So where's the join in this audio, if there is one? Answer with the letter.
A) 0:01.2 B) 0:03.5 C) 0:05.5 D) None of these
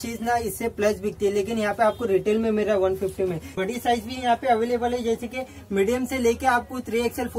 B